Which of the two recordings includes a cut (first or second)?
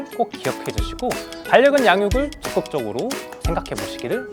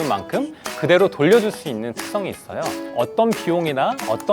second